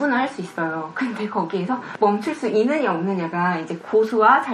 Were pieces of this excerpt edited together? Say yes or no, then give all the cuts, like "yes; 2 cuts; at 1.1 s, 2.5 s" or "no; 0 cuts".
no; 0 cuts